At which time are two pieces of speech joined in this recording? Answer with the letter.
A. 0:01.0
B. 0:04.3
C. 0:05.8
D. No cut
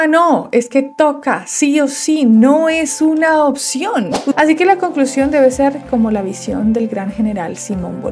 B